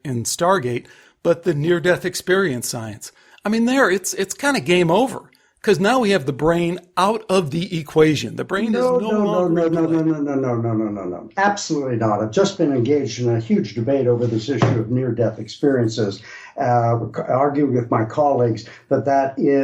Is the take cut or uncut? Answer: uncut